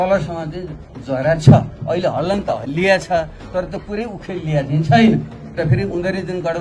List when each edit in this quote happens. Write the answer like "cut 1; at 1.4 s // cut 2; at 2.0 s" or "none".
none